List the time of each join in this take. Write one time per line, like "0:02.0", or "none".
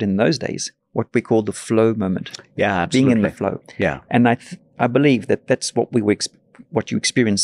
none